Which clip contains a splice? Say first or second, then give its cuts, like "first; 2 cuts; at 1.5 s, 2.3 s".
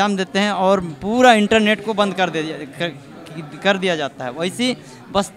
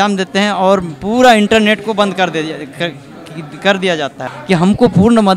second; 1 cut; at 4.2 s